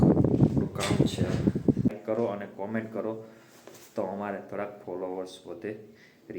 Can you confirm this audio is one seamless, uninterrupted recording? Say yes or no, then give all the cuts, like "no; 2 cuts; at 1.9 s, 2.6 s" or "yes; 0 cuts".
no; 1 cut; at 2.0 s